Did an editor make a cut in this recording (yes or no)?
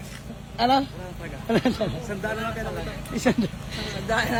no